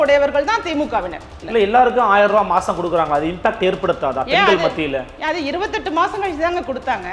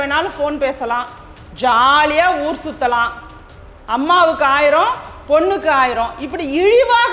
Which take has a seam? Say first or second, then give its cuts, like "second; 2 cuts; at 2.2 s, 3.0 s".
first; 1 cut; at 1.3 s